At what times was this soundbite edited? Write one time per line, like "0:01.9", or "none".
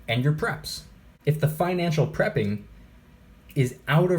0:01.0